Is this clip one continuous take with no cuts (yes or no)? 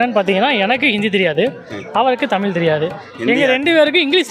yes